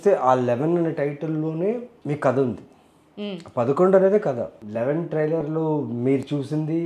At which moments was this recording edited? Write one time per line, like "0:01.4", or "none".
0:01.9
0:04.6